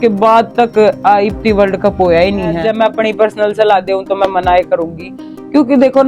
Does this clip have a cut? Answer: yes; 1 cut; at 2.6 s

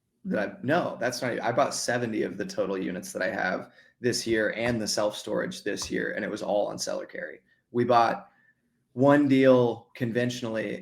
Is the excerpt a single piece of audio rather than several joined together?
no; 1 cut; at 9.9 s

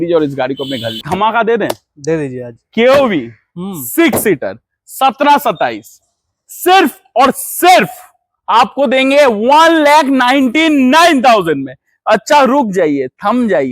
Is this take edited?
yes; 1 cut; at 1.0 s

